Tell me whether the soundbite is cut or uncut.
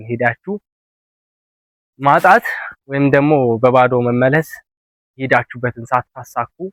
uncut